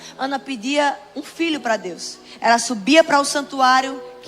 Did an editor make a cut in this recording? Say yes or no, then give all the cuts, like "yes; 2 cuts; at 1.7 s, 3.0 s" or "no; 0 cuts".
no; 0 cuts